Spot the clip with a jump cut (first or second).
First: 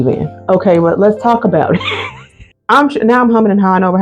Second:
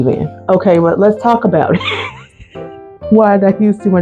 first